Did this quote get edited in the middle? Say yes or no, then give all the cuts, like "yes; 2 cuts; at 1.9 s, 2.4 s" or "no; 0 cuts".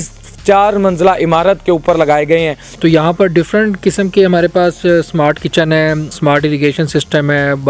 yes; 2 cuts; at 2.6 s, 6.1 s